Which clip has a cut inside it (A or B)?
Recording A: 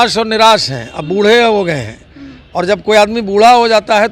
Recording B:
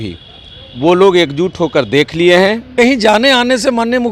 B